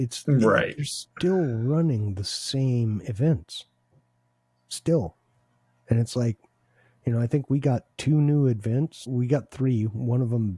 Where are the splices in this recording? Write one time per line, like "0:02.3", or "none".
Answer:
0:09.1

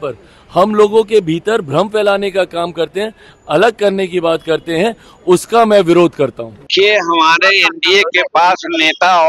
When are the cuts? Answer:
0:06.6

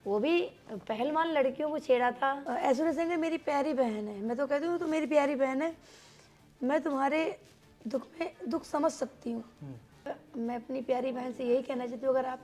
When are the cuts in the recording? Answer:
0:02.4
0:10.0

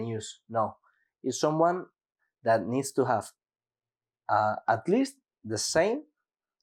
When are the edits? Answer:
none

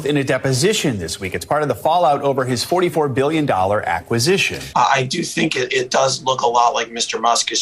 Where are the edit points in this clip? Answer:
0:04.6

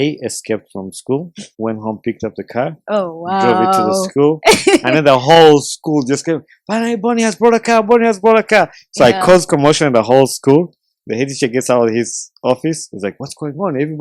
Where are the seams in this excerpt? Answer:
0:01.4

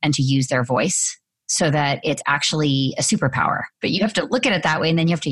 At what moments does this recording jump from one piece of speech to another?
0:03.8

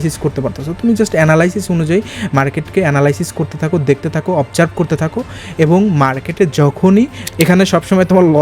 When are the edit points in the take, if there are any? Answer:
0:07.2

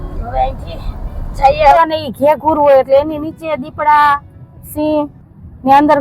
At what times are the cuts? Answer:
0:01.8

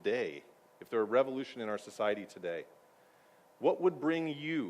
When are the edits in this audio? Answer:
0:02.3

